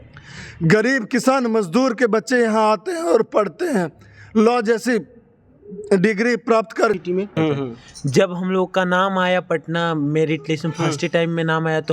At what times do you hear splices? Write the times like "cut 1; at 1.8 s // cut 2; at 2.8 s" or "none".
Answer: cut 1; at 7.0 s